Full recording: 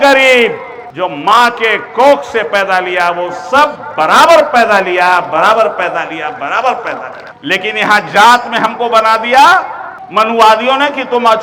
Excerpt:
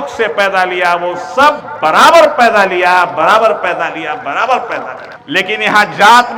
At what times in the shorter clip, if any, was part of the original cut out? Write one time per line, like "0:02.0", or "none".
none